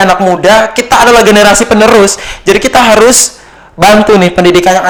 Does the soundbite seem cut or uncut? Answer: uncut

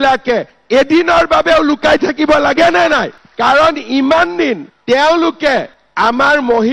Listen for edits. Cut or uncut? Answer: uncut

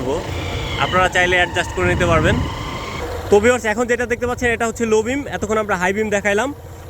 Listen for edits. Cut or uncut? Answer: cut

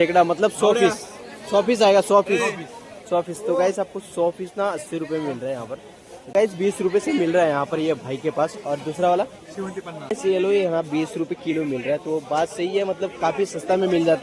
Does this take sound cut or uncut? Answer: cut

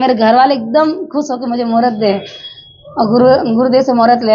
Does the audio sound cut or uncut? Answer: uncut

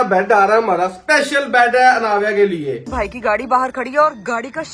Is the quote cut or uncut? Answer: cut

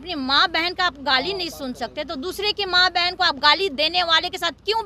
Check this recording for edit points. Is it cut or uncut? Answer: uncut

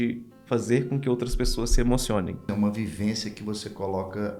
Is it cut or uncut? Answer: cut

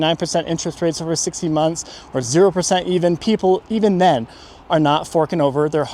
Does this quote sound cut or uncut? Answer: uncut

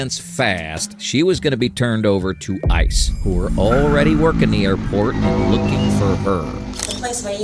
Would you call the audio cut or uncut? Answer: uncut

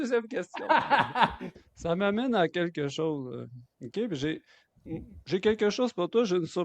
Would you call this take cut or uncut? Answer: cut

